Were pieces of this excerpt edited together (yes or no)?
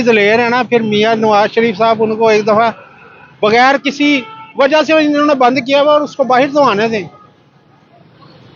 no